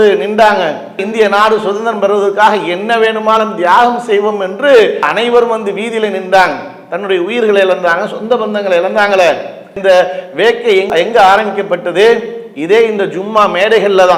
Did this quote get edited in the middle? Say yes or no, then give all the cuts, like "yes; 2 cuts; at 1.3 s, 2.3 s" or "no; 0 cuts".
no; 0 cuts